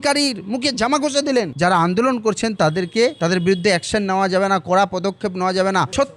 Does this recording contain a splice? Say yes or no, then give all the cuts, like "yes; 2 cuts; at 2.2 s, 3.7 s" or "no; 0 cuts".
yes; 1 cut; at 1.5 s